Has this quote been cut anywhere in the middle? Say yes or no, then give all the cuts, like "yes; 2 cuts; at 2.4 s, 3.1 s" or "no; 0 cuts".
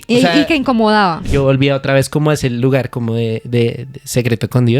yes; 1 cut; at 1.3 s